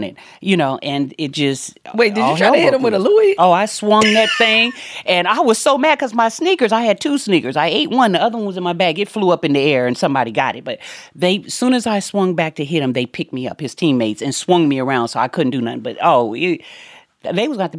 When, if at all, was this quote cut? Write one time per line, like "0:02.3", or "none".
none